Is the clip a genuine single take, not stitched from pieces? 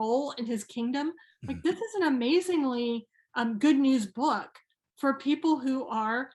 yes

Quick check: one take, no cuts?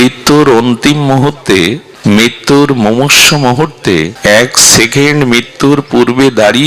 no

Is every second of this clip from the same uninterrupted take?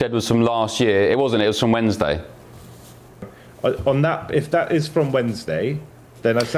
no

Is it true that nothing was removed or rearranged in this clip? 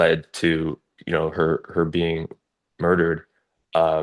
yes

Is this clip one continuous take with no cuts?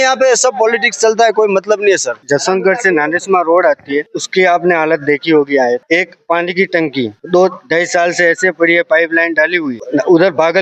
yes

